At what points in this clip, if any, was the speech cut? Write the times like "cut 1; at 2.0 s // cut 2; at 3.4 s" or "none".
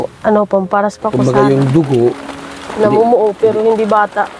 cut 1; at 1.1 s